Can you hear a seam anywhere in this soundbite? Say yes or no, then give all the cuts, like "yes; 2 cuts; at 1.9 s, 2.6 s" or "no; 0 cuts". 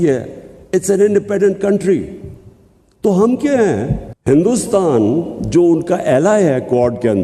yes; 1 cut; at 3.9 s